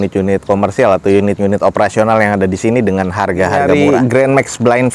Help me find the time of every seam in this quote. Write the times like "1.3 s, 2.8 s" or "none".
3.6 s

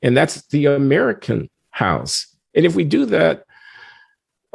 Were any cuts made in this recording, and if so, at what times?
none

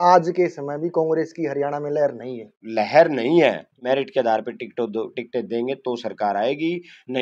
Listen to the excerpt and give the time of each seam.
2.6 s, 3.7 s

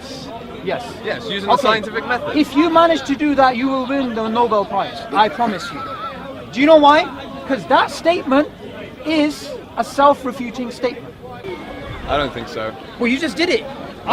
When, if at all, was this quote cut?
11.4 s

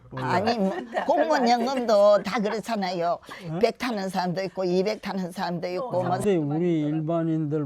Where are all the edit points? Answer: 6.2 s

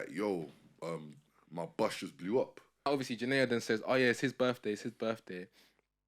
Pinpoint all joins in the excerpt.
2.9 s

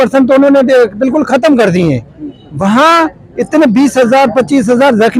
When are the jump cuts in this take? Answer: none

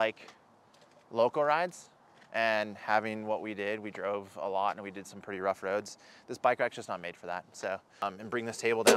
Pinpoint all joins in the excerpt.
8.0 s

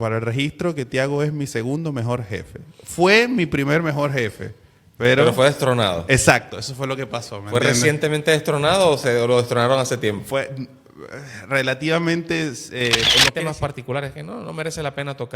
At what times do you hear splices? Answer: 13.2 s

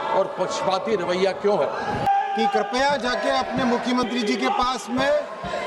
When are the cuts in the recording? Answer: 2.1 s

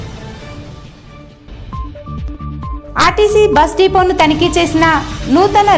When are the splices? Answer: 1.3 s

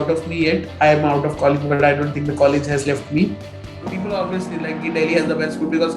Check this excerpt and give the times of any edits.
3.8 s

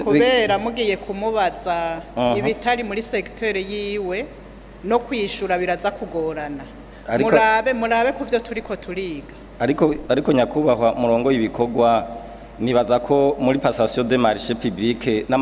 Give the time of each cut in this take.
none

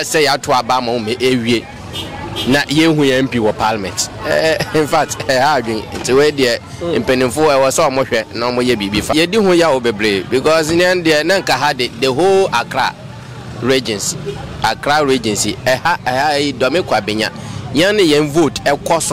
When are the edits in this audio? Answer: 9.1 s

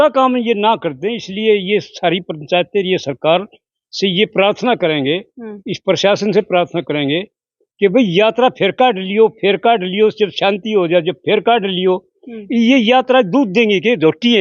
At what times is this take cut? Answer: none

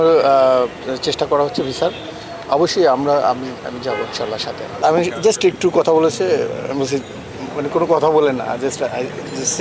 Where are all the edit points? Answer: 4.8 s

